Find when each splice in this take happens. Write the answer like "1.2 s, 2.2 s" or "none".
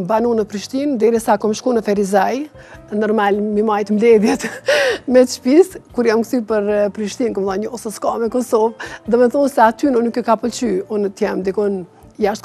none